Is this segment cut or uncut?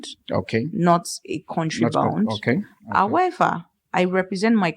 uncut